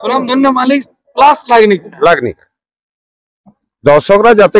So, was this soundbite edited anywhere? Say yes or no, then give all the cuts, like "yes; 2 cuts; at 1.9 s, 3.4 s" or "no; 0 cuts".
no; 0 cuts